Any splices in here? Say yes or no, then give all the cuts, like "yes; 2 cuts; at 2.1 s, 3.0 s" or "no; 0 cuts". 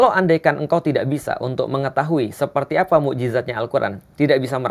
no; 0 cuts